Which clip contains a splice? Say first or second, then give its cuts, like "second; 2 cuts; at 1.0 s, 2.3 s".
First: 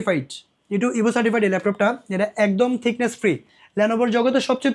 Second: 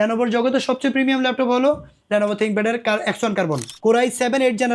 second; 1 cut; at 3.7 s